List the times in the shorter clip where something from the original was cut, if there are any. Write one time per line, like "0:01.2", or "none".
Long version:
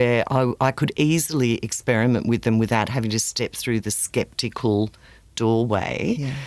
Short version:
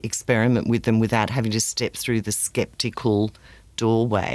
none